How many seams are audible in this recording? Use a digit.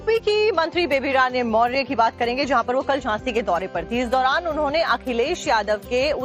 1